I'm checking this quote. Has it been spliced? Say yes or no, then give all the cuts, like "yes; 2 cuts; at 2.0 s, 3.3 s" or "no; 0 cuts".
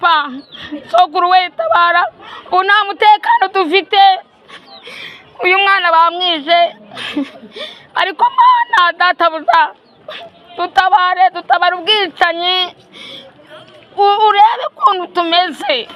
no; 0 cuts